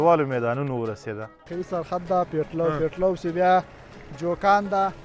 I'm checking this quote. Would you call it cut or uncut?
cut